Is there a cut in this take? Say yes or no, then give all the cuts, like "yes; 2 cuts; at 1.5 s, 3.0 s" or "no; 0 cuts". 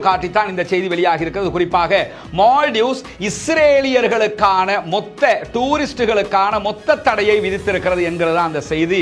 no; 0 cuts